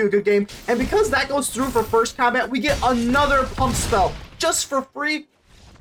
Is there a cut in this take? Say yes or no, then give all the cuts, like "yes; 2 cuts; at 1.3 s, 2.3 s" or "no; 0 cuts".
no; 0 cuts